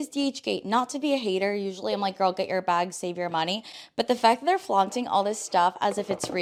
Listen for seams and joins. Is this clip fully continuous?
yes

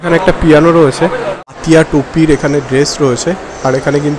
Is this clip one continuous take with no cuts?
no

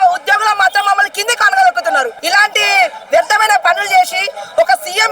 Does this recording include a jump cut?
yes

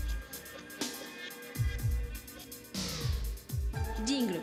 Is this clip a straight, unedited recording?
yes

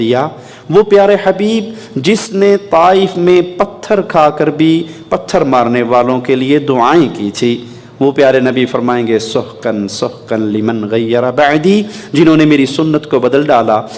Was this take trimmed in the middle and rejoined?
no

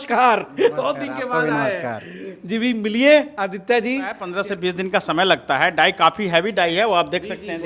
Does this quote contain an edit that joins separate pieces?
yes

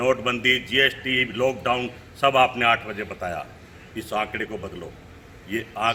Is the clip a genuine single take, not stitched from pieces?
yes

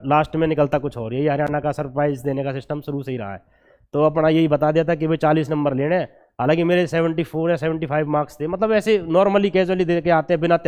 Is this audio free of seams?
yes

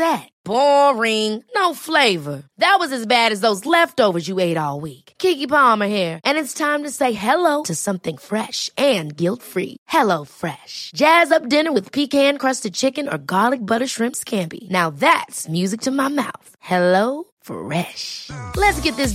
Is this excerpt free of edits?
yes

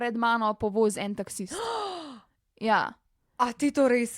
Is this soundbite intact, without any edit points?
yes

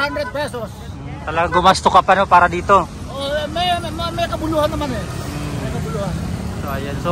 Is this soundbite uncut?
yes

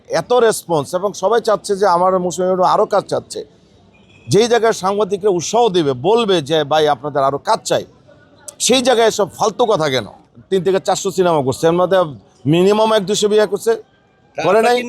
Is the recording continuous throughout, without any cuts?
no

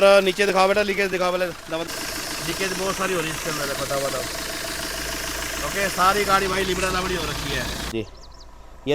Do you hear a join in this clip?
yes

